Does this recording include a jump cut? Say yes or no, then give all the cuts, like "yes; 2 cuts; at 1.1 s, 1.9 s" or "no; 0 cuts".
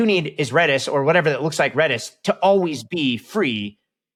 no; 0 cuts